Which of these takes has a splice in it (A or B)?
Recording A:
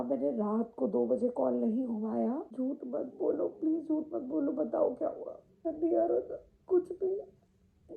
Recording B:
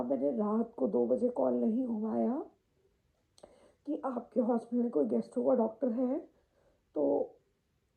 A